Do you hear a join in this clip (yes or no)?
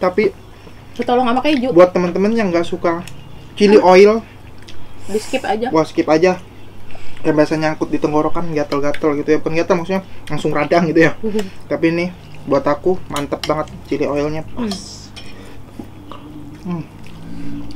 no